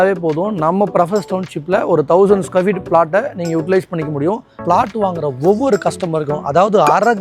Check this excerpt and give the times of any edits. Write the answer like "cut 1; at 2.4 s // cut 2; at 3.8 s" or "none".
cut 1; at 4.5 s